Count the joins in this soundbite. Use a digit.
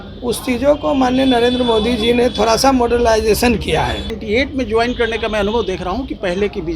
1